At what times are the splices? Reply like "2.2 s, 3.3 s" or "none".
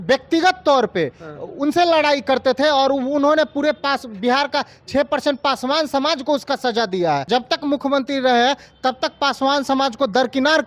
7.2 s